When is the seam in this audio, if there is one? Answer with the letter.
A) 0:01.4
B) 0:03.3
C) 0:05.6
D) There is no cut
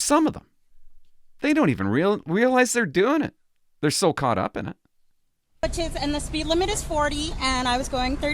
C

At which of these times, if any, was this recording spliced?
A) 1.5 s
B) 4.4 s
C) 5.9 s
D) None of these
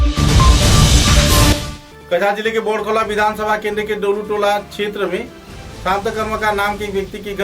A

